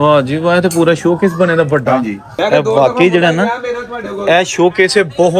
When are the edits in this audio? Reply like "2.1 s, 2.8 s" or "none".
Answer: 2.2 s